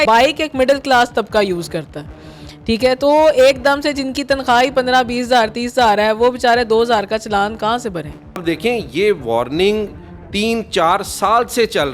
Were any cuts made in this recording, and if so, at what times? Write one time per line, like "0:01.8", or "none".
0:08.4